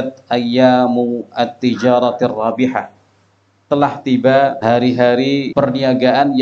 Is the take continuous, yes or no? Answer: no